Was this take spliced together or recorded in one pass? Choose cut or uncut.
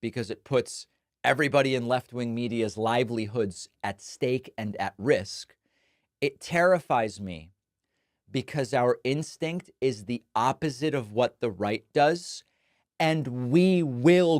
cut